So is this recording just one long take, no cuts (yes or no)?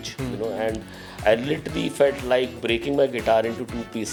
yes